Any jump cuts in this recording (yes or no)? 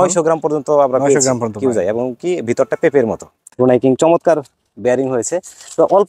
yes